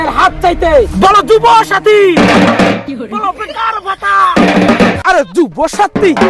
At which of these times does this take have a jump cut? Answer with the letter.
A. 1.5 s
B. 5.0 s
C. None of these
B